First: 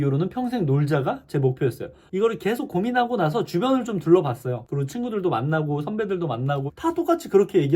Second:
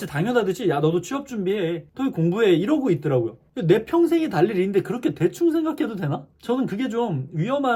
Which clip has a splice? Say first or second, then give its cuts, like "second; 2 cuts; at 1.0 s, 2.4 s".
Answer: first; 2 cuts; at 2.0 s, 6.6 s